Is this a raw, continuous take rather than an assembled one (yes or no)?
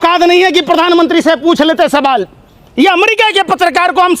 yes